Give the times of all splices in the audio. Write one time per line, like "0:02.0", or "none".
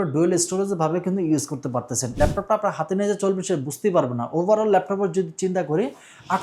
0:02.1